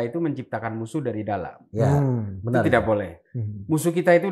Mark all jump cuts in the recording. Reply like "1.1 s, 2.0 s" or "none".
none